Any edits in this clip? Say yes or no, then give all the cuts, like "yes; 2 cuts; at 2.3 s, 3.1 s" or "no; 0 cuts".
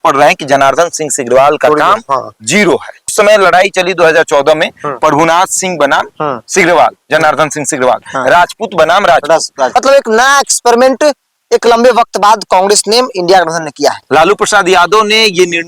yes; 3 cuts; at 3.1 s, 9.7 s, 14.0 s